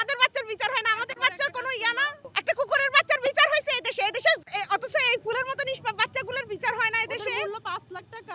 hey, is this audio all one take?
yes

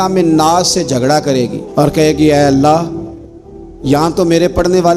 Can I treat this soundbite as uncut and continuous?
yes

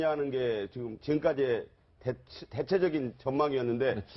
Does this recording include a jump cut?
no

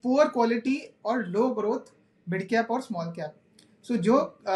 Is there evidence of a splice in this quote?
no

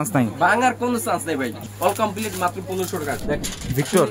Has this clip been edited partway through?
yes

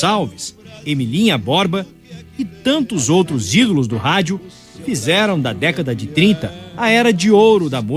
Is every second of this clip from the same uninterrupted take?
no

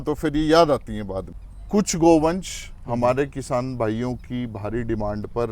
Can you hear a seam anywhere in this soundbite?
yes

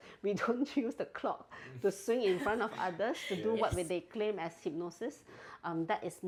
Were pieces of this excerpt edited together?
no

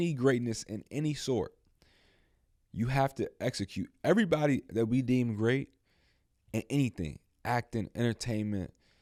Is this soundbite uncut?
yes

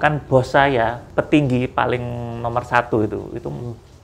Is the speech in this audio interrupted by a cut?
yes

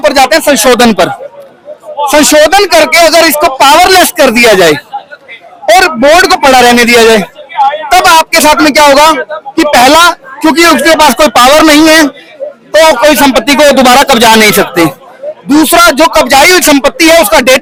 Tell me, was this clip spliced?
no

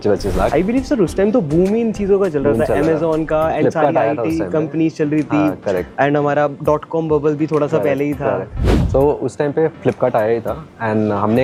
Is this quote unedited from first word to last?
yes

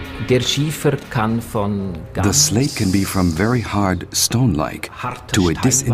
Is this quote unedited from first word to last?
no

